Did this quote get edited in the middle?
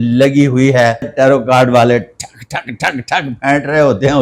yes; 1 cut; at 1.1 s

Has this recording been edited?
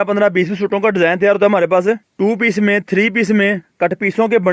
yes; 2 cuts; at 2.1 s, 3.7 s

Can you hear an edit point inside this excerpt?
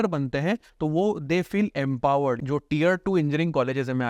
yes; 1 cut; at 2.4 s

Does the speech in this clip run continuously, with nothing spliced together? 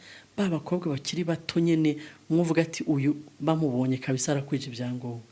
yes; 0 cuts

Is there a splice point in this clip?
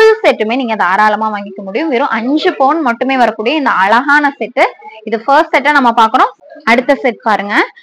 no; 0 cuts

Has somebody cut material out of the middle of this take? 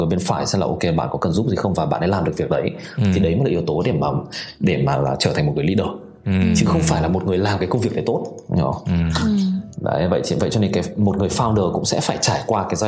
no; 0 cuts

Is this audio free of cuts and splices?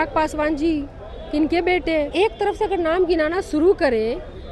no; 1 cut; at 2.1 s

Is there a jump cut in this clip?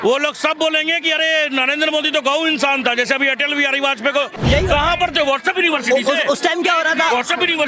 yes; 1 cut; at 4.3 s

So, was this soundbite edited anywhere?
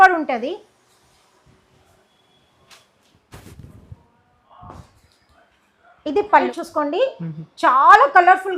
yes; 1 cut; at 6.6 s

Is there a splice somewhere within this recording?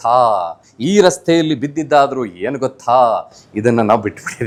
no; 0 cuts

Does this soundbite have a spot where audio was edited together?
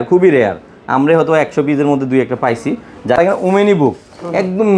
yes; 1 cut; at 3.2 s

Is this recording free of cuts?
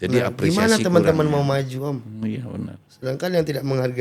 yes; 0 cuts

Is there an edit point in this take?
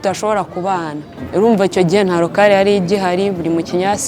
yes; 1 cut; at 1.2 s

